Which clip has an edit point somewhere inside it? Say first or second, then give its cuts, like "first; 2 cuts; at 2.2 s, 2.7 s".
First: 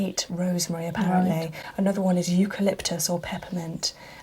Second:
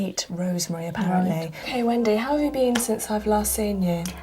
second; 1 cut; at 1.7 s